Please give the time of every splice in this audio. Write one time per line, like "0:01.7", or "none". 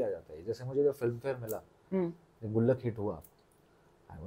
none